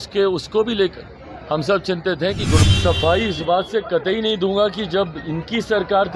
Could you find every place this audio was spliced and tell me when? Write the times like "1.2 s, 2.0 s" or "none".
2.6 s